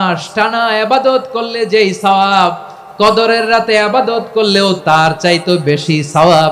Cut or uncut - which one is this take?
cut